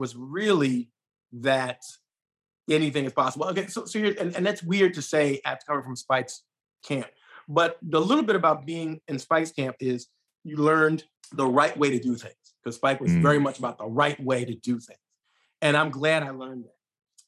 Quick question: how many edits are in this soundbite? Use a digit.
1